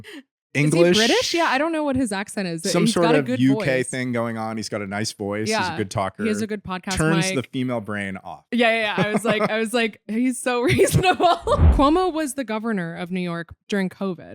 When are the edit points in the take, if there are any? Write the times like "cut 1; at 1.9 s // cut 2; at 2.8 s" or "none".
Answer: cut 1; at 11.7 s